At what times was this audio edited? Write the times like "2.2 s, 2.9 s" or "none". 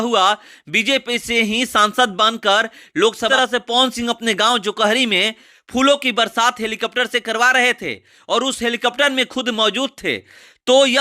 3.3 s